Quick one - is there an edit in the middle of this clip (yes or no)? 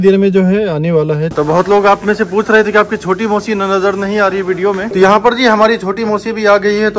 yes